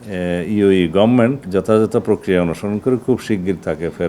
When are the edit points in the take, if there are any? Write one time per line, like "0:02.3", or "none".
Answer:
0:01.4